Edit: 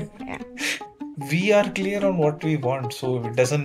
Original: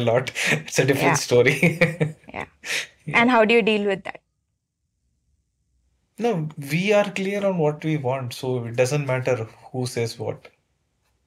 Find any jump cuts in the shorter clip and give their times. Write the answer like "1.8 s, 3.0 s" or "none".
1.0 s